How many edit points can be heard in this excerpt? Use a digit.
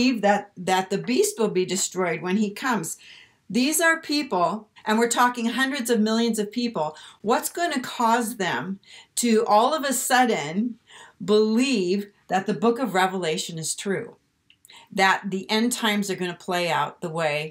1